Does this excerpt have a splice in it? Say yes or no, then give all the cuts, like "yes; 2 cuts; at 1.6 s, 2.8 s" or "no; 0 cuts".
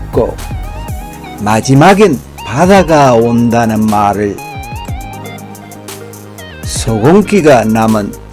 yes; 2 cuts; at 4.4 s, 6.7 s